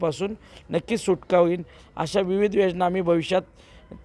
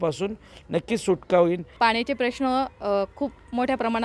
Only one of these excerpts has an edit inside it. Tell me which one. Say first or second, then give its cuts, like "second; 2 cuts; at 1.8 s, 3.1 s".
second; 1 cut; at 1.7 s